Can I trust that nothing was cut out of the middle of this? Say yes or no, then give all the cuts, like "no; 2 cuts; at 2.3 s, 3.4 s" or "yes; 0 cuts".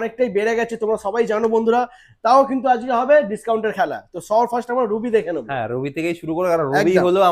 yes; 0 cuts